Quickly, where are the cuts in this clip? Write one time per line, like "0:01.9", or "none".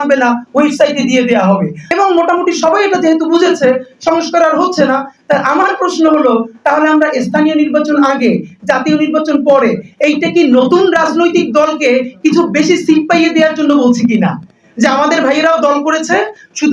0:01.8